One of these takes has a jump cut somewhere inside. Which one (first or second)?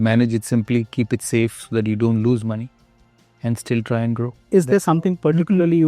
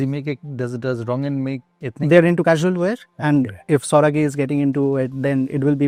first